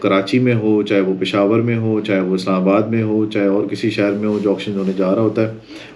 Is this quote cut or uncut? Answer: uncut